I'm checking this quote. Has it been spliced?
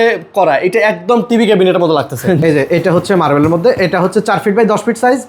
yes; 1 cut; at 2.4 s

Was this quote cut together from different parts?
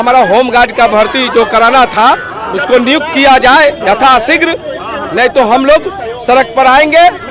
no; 0 cuts

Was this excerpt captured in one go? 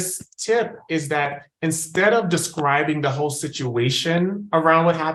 yes; 0 cuts

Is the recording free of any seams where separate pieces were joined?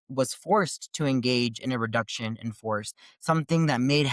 yes; 0 cuts

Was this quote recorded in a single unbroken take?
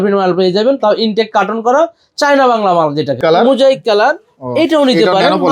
no; 1 cut; at 3.2 s

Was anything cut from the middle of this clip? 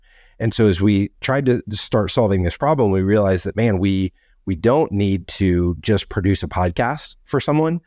no; 0 cuts

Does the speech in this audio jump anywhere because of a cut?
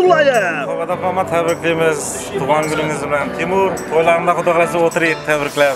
no; 0 cuts

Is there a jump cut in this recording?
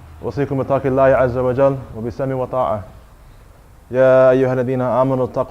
yes; 1 cut; at 1.6 s

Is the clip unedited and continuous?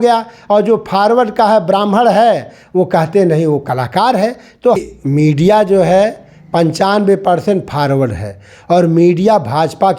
no; 1 cut; at 4.8 s

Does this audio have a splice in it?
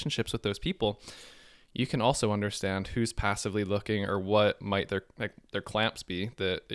no; 0 cuts

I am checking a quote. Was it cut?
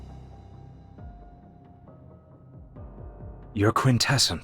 yes; 1 cut; at 3.5 s

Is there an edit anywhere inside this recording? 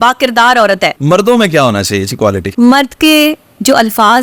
yes; 2 cuts; at 1.0 s, 2.5 s

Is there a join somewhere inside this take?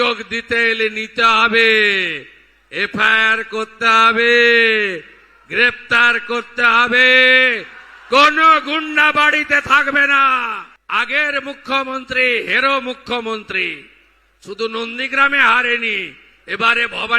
yes; 1 cut; at 10.7 s

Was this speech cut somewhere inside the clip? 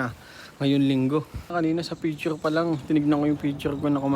yes; 1 cut; at 1.5 s

